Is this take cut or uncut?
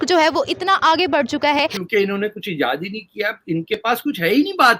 cut